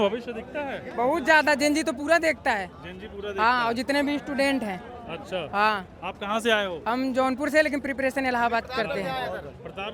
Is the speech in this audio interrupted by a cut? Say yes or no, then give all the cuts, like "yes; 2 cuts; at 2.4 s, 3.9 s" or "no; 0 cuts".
no; 0 cuts